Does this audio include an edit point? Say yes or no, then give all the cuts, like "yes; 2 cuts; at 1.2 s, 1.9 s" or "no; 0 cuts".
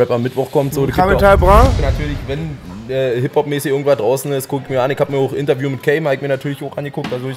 yes; 1 cut; at 1.8 s